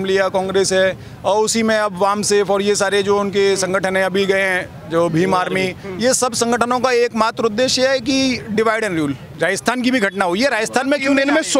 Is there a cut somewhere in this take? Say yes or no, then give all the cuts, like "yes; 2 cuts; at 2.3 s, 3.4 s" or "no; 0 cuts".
yes; 1 cut; at 9.2 s